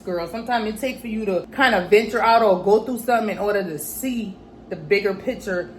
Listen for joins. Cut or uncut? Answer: cut